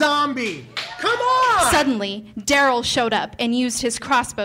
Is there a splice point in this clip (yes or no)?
yes